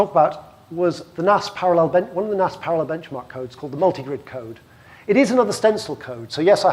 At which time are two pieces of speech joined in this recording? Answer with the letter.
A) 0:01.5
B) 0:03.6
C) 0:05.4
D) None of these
C